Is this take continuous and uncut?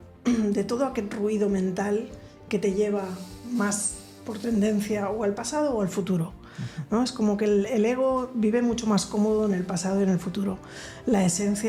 yes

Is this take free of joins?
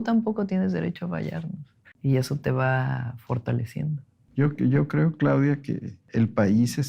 yes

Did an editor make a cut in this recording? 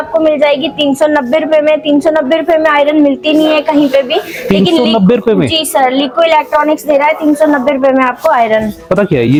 no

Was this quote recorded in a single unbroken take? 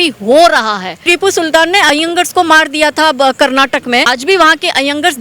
no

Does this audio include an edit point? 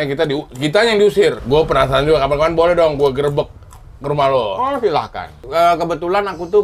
yes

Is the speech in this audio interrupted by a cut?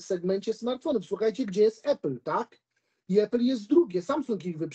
no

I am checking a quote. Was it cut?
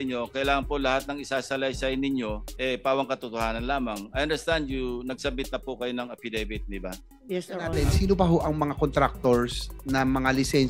yes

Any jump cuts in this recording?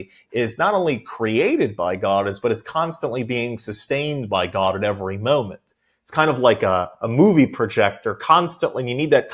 no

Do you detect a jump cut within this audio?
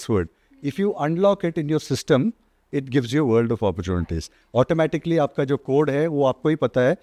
no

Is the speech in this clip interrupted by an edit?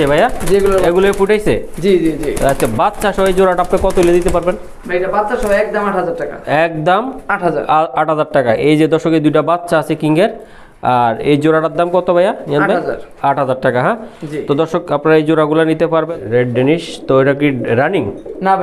yes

